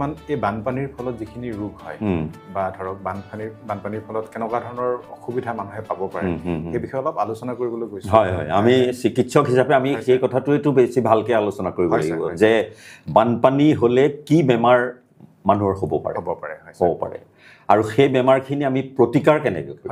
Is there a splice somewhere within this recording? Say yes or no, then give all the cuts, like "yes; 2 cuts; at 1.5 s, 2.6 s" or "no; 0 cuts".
no; 0 cuts